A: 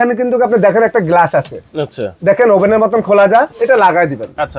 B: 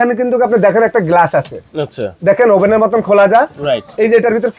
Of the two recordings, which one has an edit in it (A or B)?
A